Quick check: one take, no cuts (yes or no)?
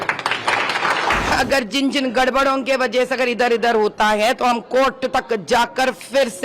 no